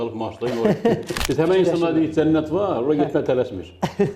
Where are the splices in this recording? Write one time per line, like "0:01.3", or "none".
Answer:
0:01.2